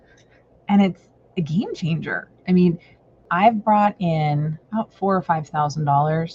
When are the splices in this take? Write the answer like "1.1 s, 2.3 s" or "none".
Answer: 3.2 s, 4.6 s